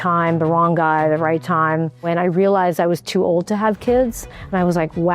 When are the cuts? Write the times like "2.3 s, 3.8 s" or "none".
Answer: 2.0 s